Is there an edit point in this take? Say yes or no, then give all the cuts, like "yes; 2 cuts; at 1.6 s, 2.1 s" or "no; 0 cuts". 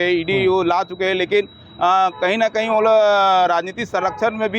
no; 0 cuts